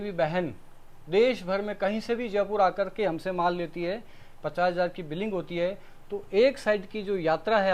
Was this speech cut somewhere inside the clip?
no; 0 cuts

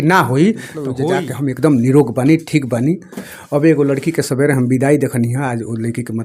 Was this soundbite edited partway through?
yes; 1 cut; at 1.0 s

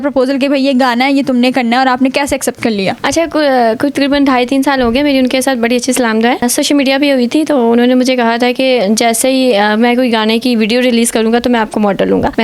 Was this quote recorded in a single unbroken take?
yes; 0 cuts

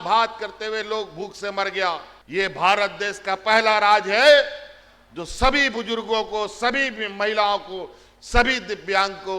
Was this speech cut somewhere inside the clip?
yes; 1 cut; at 2.1 s

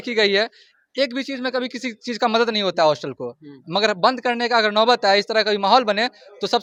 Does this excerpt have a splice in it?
no; 0 cuts

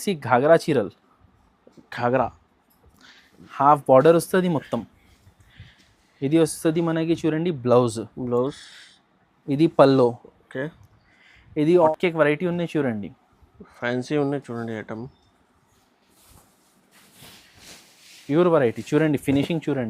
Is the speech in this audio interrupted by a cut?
yes; 1 cut; at 11.9 s

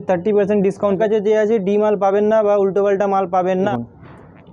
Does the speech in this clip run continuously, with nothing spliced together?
no; 2 cuts; at 1.0 s, 3.7 s

